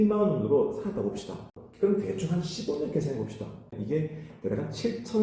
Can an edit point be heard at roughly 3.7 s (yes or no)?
yes